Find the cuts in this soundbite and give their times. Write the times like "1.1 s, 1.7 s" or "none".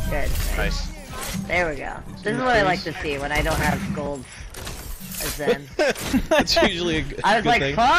none